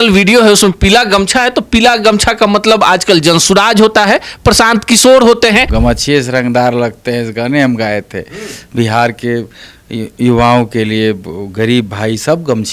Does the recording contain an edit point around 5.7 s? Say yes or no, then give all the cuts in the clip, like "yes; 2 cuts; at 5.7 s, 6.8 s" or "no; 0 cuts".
yes; 1 cut; at 5.7 s